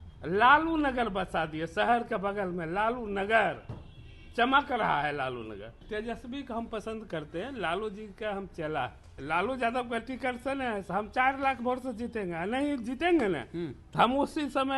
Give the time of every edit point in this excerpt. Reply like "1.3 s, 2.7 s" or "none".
5.8 s, 9.1 s